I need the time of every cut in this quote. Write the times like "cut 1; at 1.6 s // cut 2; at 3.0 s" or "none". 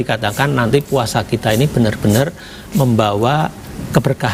none